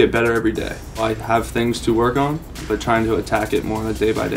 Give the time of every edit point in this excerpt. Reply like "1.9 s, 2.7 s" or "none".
1.0 s, 2.5 s